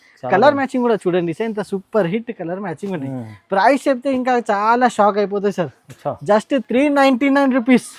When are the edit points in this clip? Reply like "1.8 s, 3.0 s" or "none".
none